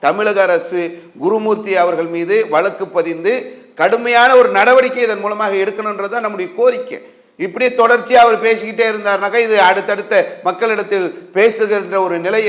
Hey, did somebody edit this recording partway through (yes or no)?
no